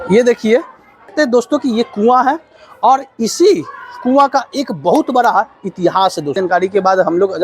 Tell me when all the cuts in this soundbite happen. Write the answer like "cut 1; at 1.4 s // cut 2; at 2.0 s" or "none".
cut 1; at 1.1 s // cut 2; at 6.4 s